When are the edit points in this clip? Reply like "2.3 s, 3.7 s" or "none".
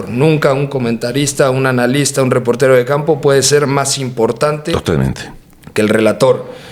none